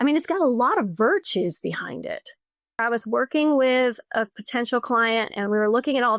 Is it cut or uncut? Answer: cut